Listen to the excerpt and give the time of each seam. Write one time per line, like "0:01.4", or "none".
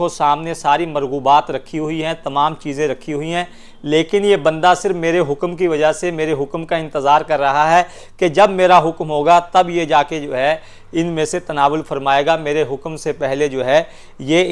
none